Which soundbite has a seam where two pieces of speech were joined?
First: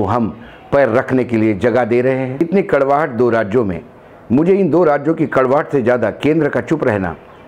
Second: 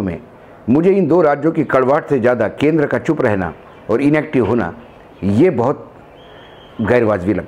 first; 1 cut; at 2.4 s

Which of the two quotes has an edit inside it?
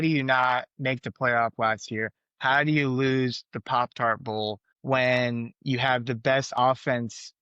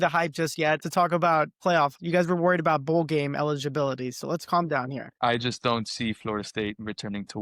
second; 3 cuts; at 0.8 s, 1.6 s, 5.1 s

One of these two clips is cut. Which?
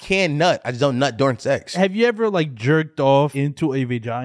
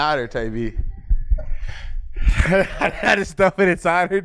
first; 2 cuts; at 1.7 s, 3.3 s

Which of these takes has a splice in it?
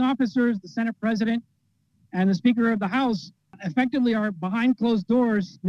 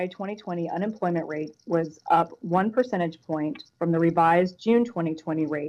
first; 1 cut; at 3.5 s

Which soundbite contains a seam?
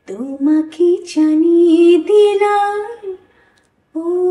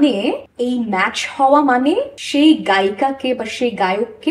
second; 1 cut; at 2.2 s

